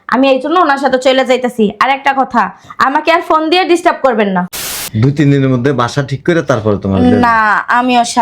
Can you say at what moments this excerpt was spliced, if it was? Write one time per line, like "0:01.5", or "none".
0:04.7